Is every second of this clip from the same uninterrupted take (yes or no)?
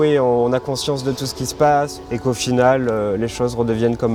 yes